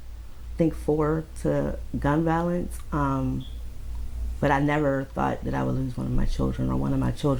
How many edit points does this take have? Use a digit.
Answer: 0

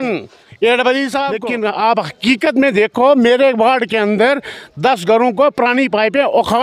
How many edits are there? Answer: 1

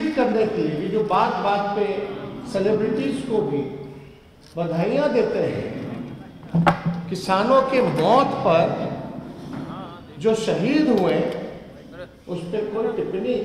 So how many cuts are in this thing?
0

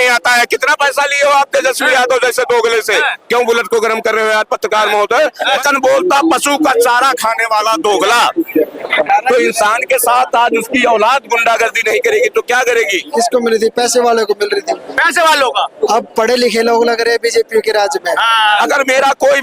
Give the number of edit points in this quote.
3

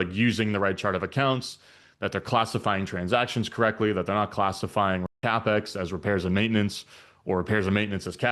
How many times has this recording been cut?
1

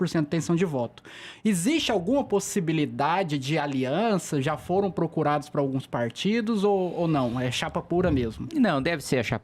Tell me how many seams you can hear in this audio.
0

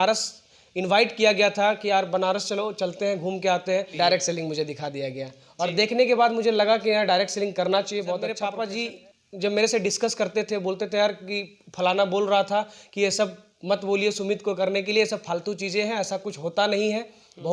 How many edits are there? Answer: 2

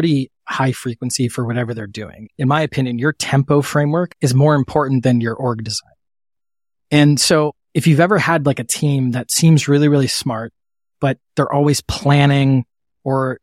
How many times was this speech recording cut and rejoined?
2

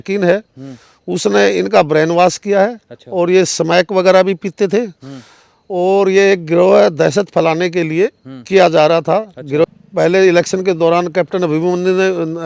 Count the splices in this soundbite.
1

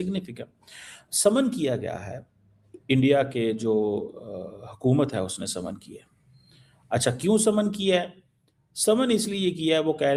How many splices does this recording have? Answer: 0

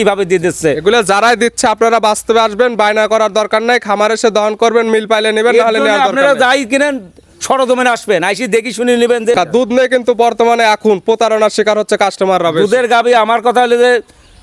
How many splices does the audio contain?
1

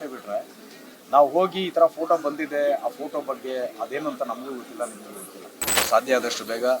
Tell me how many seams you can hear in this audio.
1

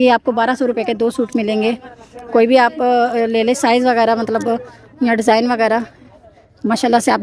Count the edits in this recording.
0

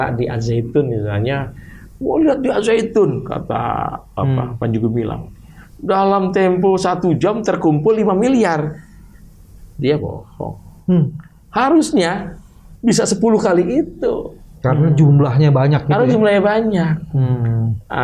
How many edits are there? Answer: 0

